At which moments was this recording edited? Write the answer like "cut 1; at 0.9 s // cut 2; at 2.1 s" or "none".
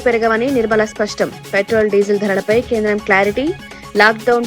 none